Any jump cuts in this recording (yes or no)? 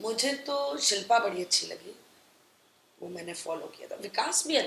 no